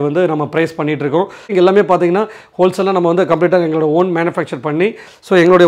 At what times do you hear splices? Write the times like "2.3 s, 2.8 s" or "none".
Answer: 1.5 s